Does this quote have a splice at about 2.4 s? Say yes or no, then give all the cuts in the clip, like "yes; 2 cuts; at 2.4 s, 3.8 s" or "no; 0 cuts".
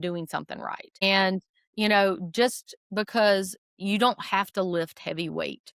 no; 2 cuts; at 1.0 s, 3.6 s